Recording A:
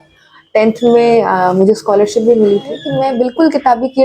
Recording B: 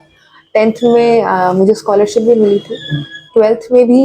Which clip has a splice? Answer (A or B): A